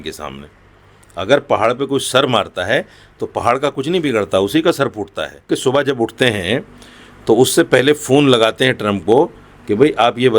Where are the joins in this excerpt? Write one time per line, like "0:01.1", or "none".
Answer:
0:05.5

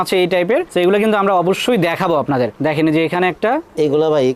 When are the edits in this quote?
none

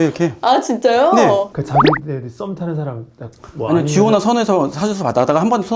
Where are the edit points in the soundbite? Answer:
0:01.5

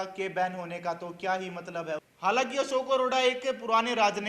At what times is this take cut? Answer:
0:02.1

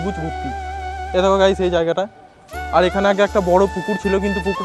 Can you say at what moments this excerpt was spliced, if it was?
none

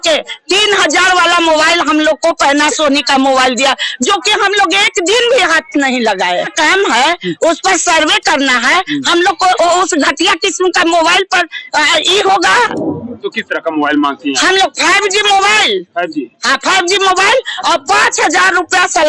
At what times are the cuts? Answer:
none

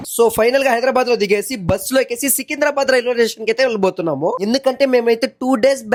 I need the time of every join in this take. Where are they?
none

